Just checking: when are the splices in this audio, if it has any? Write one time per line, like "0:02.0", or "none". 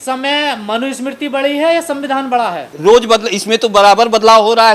0:02.7